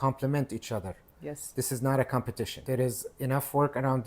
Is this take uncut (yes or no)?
no